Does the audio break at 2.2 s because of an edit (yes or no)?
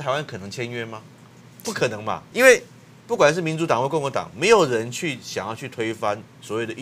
yes